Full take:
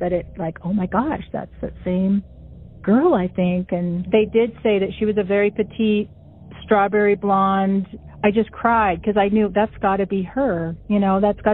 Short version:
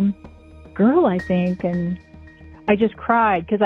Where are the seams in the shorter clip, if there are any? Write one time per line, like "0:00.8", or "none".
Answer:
0:02.0